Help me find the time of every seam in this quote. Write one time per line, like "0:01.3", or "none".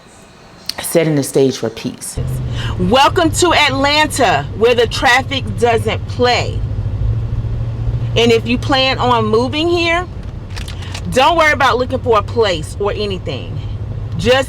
0:02.4